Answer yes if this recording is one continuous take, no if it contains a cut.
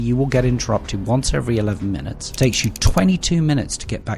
no